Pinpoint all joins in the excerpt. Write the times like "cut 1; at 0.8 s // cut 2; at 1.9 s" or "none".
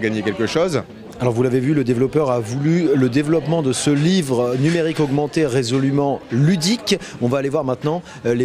none